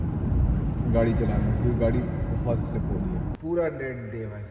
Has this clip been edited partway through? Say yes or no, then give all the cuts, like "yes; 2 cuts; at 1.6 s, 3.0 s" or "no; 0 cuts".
yes; 1 cut; at 3.3 s